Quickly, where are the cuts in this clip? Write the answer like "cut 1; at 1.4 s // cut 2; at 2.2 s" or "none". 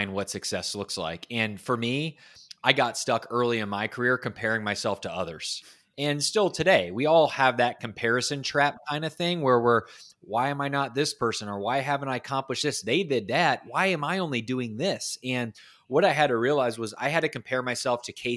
none